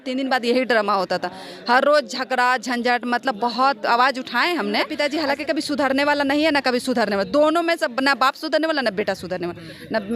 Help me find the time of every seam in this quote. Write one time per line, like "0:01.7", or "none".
0:04.9